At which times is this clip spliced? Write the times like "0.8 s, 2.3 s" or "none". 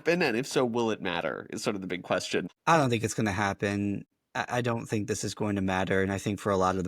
2.5 s, 4.1 s